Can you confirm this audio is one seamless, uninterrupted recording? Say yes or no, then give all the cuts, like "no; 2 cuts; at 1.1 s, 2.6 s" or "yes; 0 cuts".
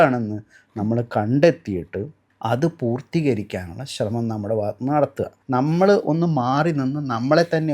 no; 2 cuts; at 2.2 s, 5.4 s